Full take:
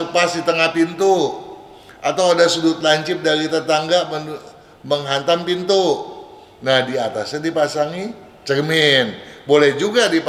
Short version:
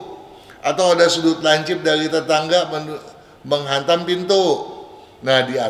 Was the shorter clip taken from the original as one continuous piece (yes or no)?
yes